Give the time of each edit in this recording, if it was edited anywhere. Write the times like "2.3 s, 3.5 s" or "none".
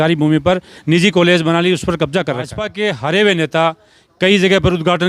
2.6 s